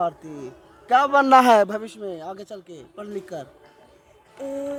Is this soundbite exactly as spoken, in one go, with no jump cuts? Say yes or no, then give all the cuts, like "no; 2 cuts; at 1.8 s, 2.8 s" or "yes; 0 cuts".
yes; 0 cuts